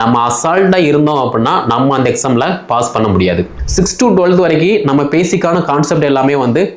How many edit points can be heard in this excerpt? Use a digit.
1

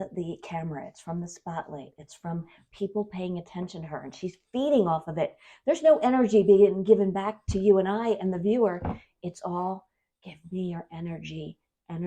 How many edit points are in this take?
1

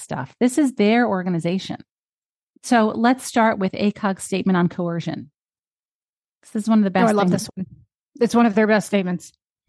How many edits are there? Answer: 0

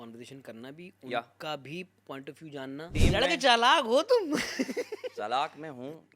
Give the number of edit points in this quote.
1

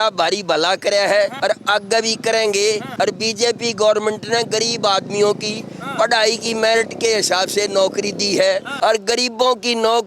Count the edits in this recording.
3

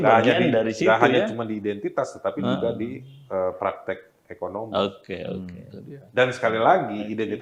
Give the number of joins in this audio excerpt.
0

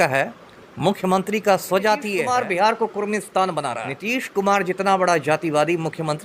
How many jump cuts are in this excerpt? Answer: 2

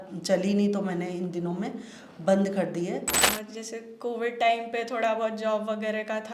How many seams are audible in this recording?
1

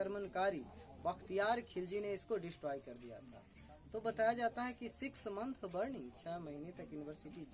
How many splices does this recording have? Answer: 0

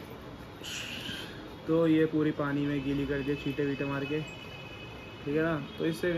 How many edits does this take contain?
1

